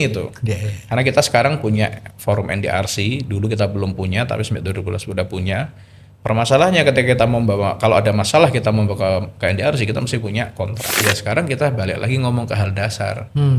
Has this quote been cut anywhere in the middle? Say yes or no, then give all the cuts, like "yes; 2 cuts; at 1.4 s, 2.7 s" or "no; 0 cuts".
yes; 1 cut; at 10.8 s